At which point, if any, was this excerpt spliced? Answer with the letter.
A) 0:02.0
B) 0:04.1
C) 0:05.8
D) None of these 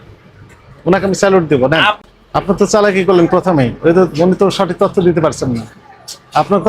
A